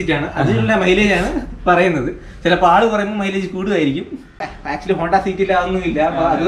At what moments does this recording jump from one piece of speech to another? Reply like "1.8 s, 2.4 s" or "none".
4.4 s

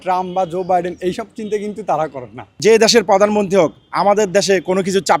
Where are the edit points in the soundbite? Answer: 2.5 s

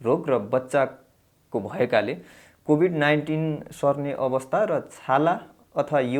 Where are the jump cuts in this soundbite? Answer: none

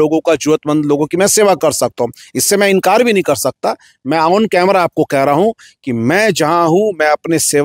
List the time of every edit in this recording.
none

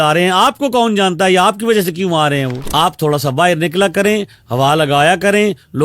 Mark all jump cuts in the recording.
2.6 s

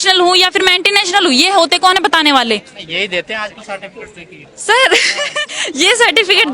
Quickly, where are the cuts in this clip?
none

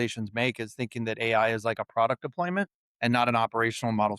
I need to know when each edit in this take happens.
2.8 s

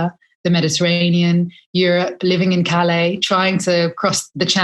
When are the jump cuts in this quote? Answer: none

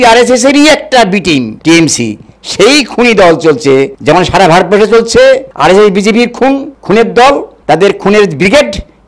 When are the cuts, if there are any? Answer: 1.5 s, 3.9 s, 5.5 s, 6.7 s

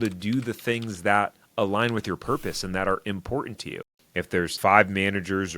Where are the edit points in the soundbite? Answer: 4.1 s

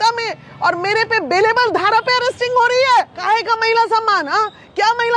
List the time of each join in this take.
3.1 s

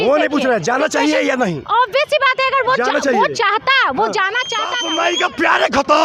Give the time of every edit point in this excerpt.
4.8 s

